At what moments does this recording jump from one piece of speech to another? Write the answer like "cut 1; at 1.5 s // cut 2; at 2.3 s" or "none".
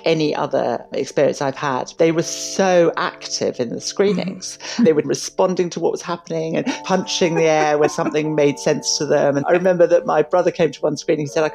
cut 1; at 1.9 s // cut 2; at 5.0 s // cut 3; at 6.8 s // cut 4; at 7.9 s // cut 5; at 9.4 s